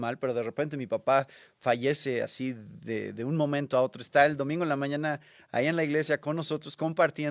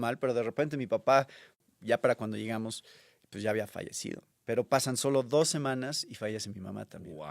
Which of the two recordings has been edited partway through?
second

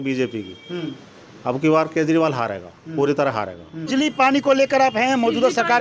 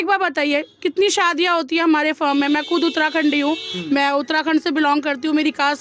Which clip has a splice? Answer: first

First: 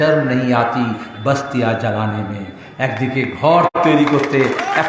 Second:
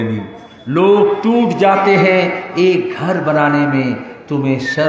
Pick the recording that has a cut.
first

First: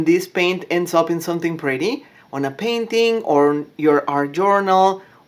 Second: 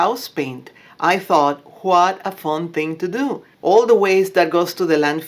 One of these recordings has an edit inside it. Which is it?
second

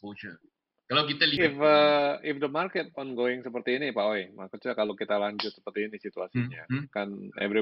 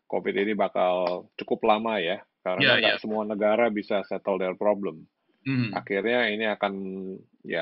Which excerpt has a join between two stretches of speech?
first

